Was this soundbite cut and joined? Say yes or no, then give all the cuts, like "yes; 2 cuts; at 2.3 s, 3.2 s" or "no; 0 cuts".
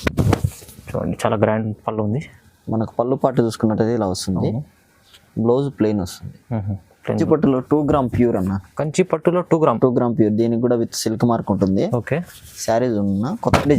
yes; 1 cut; at 7.1 s